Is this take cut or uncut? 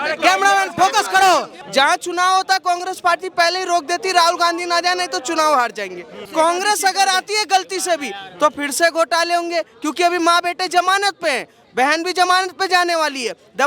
cut